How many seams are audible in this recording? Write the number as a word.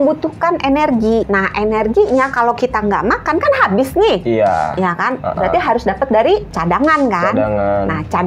two